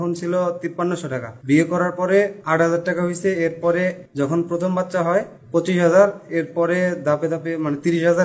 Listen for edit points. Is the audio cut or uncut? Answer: cut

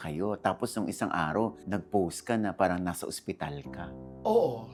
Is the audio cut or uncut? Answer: uncut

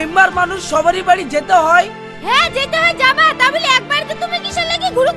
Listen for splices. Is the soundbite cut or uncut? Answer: uncut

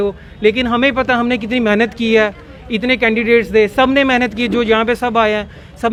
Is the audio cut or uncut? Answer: uncut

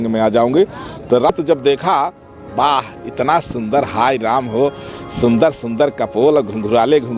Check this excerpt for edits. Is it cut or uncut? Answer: cut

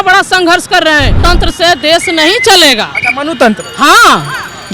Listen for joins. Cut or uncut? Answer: cut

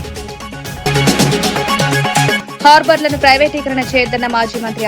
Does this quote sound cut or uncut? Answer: cut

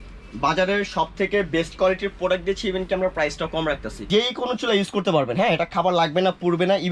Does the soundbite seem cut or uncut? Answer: cut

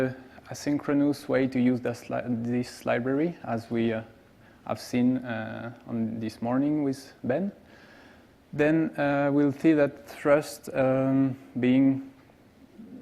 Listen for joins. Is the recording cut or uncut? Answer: cut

